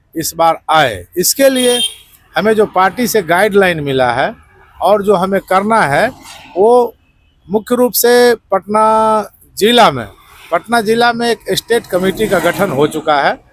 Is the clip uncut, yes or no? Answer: yes